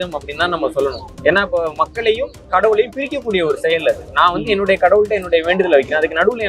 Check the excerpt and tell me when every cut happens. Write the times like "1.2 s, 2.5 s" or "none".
1.1 s